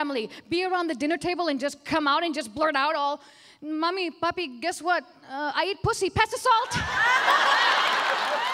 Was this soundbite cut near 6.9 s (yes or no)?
no